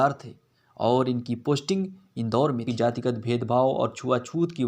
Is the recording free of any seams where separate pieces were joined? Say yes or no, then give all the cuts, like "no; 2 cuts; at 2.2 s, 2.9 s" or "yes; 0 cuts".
no; 1 cut; at 2.6 s